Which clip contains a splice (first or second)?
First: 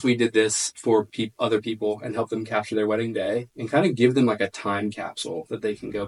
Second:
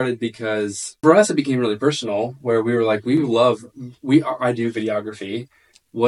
second